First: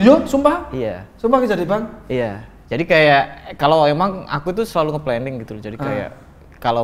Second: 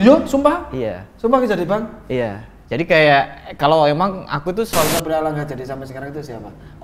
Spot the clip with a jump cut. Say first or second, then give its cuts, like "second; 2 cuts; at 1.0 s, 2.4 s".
second; 1 cut; at 4.9 s